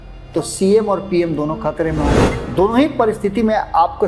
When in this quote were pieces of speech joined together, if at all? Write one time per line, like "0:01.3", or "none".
0:02.1